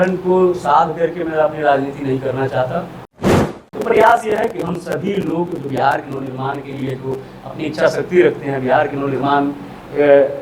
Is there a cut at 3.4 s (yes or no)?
yes